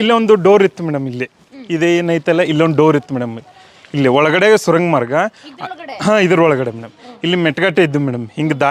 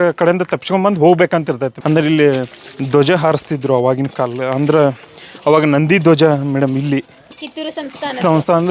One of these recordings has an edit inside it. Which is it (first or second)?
second